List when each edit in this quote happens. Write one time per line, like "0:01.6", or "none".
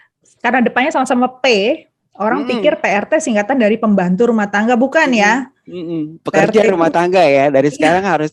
none